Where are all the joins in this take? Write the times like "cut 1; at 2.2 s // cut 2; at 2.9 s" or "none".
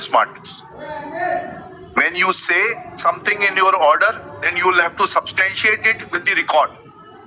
none